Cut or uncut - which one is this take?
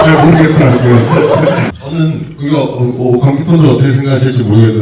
cut